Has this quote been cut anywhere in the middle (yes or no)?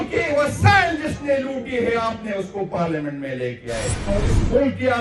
yes